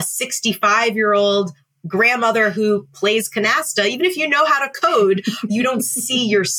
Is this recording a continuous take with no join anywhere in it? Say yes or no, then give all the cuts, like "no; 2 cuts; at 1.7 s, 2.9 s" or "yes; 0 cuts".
no; 1 cut; at 5.5 s